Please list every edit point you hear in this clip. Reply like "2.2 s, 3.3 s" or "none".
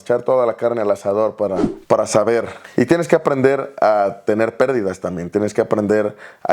1.7 s